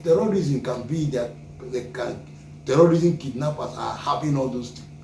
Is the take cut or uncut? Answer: uncut